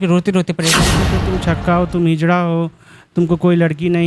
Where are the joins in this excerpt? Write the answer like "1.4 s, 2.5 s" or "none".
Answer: 1.0 s